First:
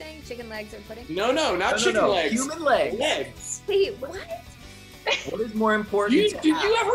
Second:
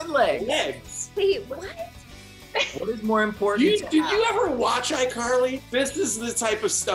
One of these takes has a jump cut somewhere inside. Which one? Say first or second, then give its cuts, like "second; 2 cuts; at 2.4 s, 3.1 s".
second; 1 cut; at 5.6 s